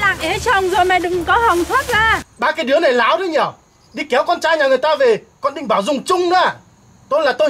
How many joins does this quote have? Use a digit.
1